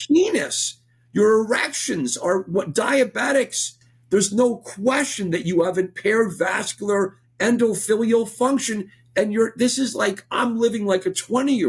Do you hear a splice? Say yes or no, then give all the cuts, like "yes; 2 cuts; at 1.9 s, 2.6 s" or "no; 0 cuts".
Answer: no; 0 cuts